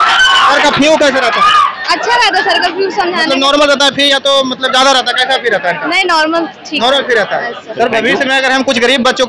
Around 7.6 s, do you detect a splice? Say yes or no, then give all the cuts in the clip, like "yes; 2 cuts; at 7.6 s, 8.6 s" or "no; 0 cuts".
yes; 1 cut; at 7.6 s